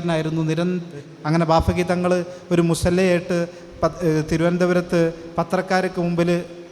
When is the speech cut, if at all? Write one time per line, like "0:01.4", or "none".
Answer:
0:01.1